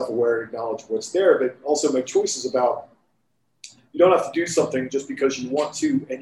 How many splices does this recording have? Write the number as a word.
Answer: zero